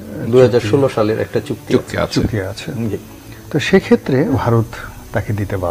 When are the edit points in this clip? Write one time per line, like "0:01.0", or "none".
0:04.4